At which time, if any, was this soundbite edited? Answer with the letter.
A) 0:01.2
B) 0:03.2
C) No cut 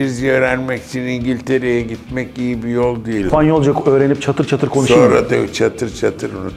B